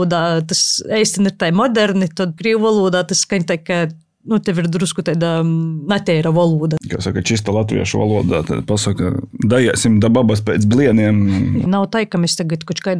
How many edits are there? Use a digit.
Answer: 3